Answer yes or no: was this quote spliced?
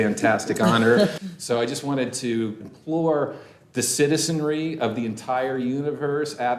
yes